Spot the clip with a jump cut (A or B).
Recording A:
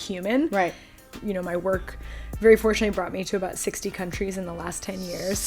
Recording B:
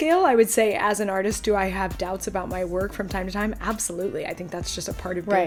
A